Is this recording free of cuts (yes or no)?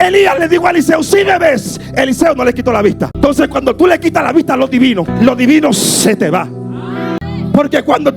no